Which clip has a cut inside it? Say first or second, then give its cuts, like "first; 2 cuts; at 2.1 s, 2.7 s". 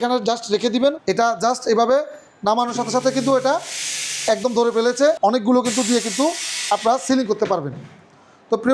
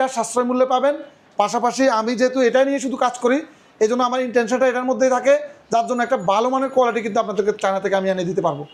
first; 2 cuts; at 1.0 s, 5.2 s